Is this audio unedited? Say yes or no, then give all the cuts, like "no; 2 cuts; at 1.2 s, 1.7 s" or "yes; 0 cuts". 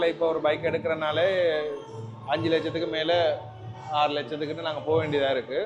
yes; 0 cuts